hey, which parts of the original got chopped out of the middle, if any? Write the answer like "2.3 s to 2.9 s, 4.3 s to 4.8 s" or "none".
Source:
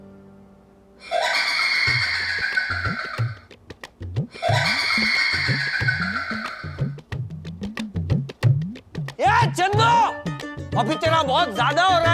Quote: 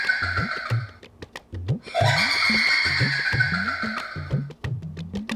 none